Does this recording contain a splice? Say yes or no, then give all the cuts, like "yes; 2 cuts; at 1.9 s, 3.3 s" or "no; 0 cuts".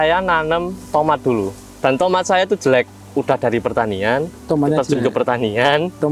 no; 0 cuts